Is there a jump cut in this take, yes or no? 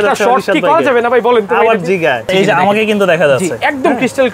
yes